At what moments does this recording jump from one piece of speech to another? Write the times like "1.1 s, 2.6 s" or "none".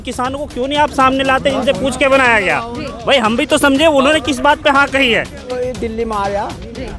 5.6 s